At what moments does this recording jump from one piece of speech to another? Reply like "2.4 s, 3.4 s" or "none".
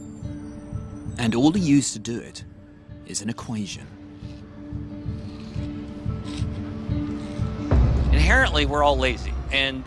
none